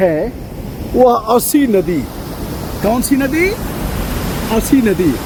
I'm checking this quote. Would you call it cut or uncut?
uncut